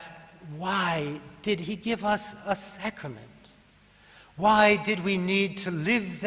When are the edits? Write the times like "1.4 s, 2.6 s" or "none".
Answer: 2.1 s